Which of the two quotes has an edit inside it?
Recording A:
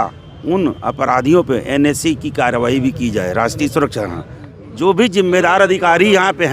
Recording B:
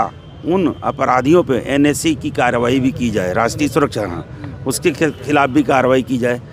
A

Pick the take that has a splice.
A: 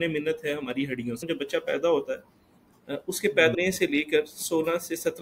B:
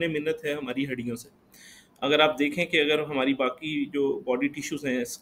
A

